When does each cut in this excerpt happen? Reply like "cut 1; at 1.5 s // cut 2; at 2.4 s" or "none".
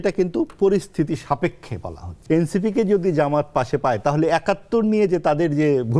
cut 1; at 2.1 s